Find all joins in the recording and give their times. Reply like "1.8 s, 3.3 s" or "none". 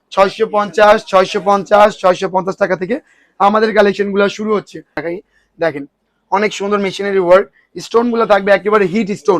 5.0 s